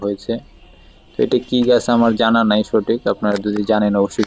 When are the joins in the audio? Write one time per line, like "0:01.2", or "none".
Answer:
none